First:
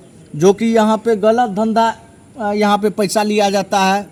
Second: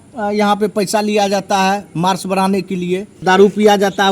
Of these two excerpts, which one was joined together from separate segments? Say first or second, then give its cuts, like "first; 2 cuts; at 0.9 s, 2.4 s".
second; 1 cut; at 3.2 s